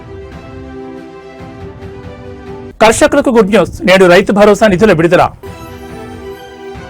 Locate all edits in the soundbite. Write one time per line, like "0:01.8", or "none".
0:02.6